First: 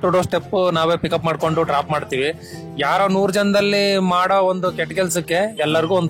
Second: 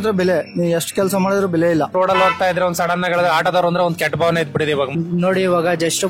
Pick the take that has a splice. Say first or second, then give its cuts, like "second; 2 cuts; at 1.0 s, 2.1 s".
second; 2 cuts; at 1.9 s, 4.9 s